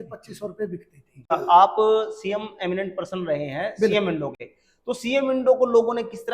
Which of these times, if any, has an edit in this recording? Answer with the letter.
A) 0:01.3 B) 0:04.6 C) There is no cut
A